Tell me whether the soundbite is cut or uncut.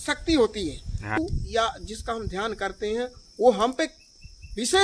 cut